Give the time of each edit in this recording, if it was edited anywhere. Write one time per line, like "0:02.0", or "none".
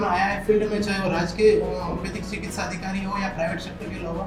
none